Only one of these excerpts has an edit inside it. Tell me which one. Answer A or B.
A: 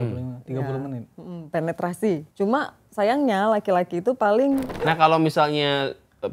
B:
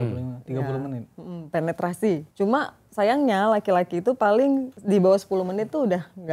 A